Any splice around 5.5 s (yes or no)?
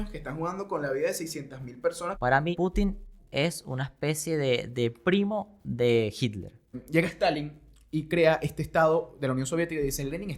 no